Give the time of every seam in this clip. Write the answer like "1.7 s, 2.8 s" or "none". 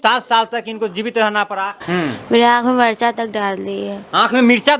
none